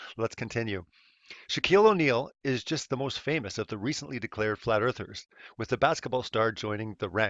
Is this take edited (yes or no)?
yes